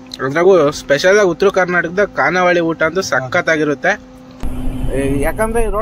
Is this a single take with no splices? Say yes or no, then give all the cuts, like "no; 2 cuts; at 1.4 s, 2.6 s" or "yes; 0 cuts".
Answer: no; 1 cut; at 4.5 s